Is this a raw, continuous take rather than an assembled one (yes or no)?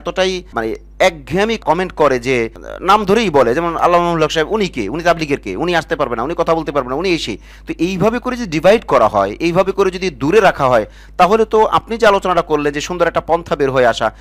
yes